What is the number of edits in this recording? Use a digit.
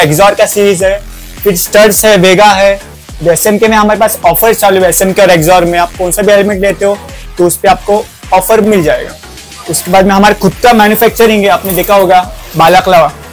0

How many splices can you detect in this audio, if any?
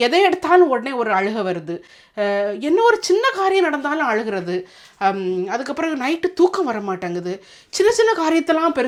0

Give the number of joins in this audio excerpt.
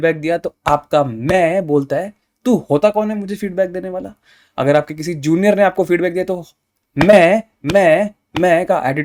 0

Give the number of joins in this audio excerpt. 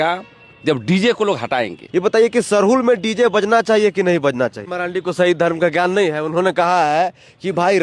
2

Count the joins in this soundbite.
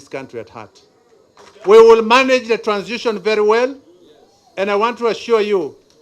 1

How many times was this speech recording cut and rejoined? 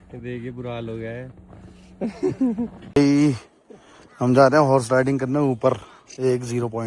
1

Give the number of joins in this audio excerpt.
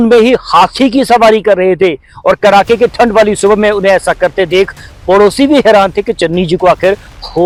0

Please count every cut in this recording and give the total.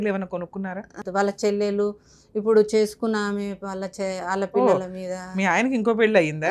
1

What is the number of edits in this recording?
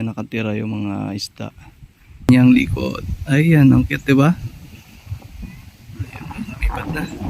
1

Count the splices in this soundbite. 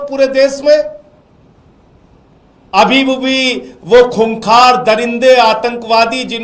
1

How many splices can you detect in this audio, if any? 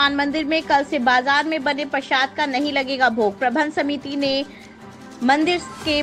0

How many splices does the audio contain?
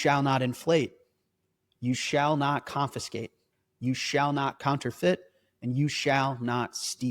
1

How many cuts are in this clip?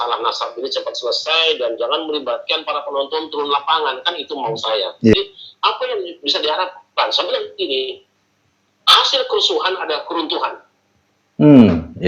1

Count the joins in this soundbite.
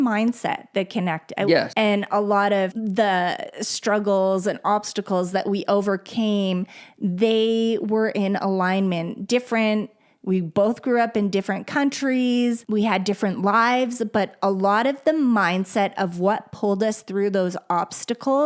3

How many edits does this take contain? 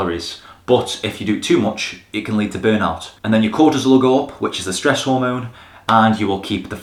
0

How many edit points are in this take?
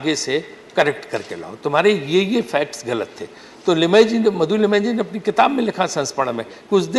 0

